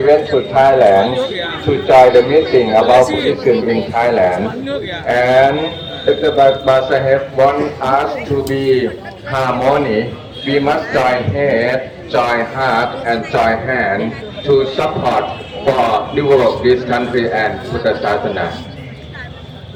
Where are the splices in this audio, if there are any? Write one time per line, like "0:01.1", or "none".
none